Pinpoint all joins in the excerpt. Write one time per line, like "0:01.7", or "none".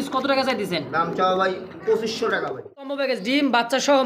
0:02.9